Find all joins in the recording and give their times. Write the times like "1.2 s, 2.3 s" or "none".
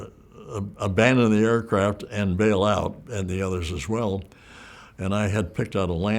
3.0 s